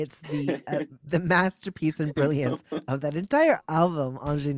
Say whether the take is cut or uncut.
cut